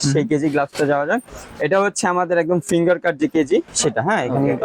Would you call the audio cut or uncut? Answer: uncut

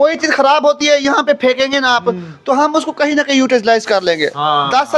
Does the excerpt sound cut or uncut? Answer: uncut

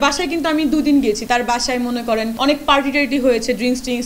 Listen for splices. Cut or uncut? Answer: cut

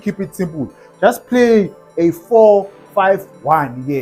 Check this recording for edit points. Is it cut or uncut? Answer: uncut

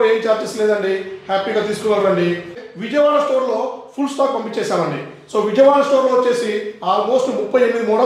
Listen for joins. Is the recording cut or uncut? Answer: cut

